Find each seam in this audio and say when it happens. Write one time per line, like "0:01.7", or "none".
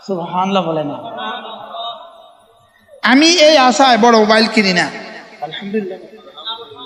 none